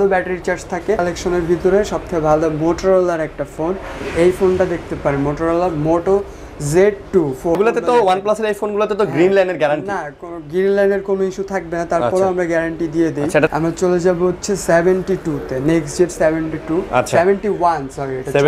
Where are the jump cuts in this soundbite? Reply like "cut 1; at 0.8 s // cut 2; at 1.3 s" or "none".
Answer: cut 1; at 1.0 s // cut 2; at 7.6 s // cut 3; at 13.5 s